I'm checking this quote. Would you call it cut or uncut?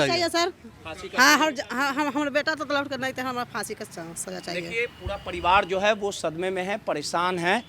uncut